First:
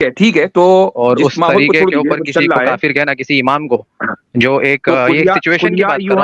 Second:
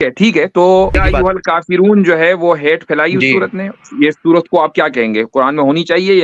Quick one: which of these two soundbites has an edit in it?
second; 1 cut; at 1.0 s

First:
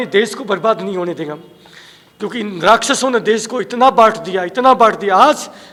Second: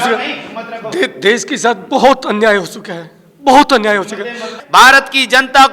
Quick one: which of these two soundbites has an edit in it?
second; 1 cut; at 4.6 s

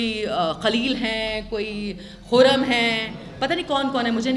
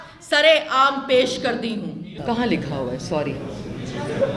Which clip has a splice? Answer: second; 1 cut; at 2.1 s

